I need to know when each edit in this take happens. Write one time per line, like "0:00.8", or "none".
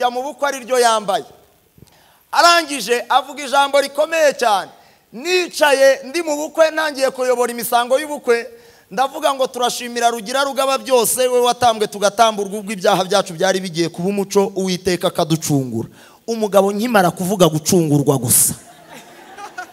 none